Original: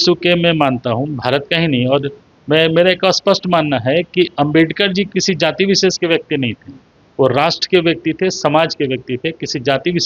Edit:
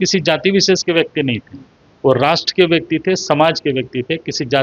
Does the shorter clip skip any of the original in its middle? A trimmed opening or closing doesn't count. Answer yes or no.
no